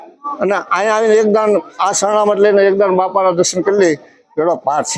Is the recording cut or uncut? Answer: uncut